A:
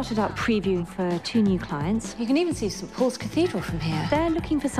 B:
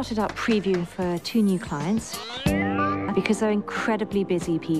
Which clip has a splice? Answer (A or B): A